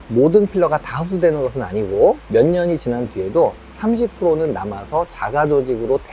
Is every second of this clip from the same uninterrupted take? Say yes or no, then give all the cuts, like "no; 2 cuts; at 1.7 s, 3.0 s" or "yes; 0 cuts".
yes; 0 cuts